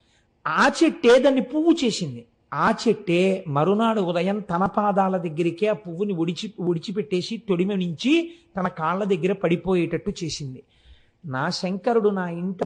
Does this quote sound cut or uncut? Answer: uncut